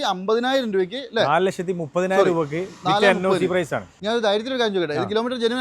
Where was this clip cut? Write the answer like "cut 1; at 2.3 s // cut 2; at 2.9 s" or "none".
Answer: cut 1; at 3.9 s